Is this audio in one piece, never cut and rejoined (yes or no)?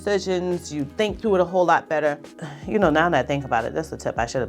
no